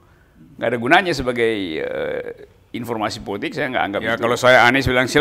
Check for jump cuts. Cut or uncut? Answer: cut